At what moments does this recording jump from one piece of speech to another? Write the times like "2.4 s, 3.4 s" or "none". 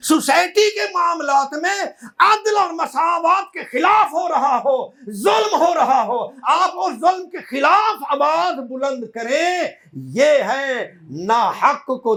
none